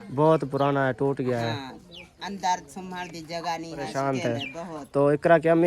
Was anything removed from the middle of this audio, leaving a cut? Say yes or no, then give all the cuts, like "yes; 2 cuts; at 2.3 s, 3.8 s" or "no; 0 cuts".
yes; 1 cut; at 3.9 s